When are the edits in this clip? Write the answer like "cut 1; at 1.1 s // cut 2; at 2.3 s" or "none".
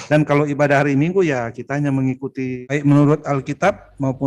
cut 1; at 2.6 s